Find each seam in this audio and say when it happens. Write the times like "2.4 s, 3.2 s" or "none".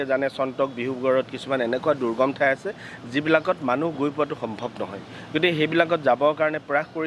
none